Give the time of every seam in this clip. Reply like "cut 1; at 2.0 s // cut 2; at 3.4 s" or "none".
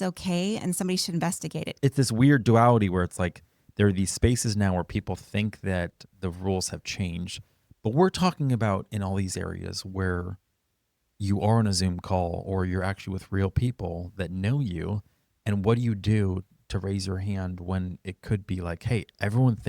cut 1; at 1.7 s

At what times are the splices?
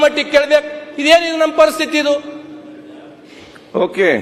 none

